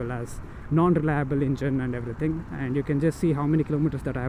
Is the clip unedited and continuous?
yes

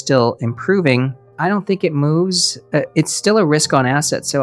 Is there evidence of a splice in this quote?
no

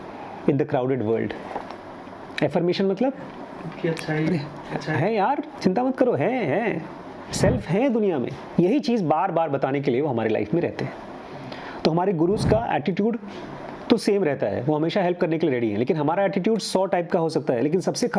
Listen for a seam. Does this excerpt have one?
yes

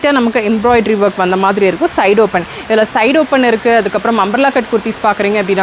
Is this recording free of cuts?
yes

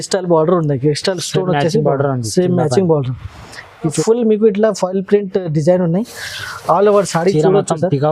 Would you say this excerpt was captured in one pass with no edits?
no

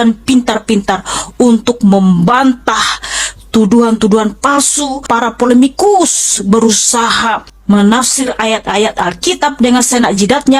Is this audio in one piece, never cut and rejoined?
no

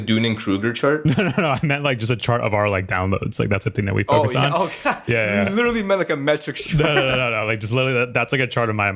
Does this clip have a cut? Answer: no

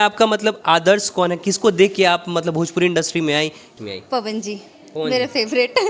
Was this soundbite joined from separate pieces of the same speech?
yes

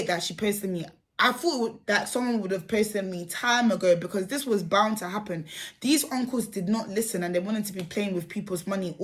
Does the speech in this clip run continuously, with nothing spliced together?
yes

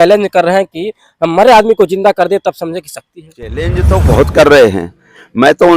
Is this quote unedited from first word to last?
no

